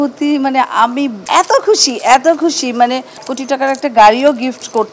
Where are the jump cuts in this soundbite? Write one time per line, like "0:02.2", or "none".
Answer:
0:01.2
0:03.3